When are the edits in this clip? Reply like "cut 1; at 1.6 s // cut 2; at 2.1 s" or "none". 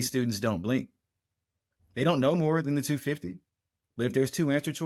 none